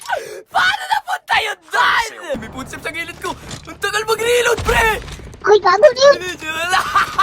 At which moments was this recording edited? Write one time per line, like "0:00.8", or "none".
0:02.4